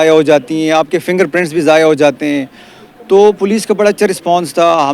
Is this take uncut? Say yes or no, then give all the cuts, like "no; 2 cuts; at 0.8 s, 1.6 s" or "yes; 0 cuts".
yes; 0 cuts